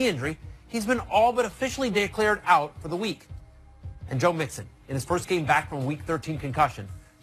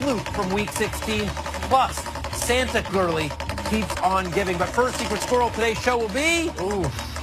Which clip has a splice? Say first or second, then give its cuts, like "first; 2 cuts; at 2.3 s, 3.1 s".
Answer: second; 1 cut; at 5.4 s